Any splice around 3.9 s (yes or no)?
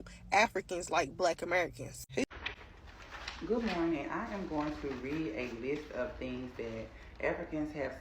no